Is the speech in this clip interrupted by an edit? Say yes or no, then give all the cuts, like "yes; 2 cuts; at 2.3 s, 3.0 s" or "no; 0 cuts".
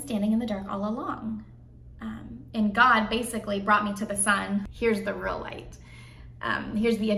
yes; 1 cut; at 4.7 s